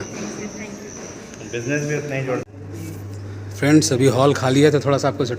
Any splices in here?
yes; 1 cut; at 2.4 s

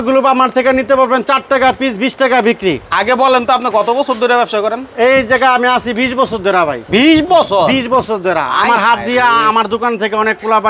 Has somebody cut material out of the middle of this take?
no; 0 cuts

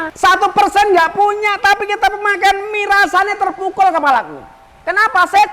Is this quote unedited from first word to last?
yes; 0 cuts

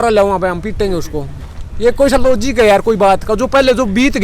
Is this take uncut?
yes; 0 cuts

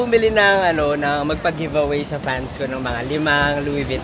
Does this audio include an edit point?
no; 0 cuts

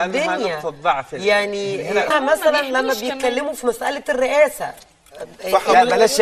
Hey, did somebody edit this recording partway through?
yes; 1 cut; at 2.1 s

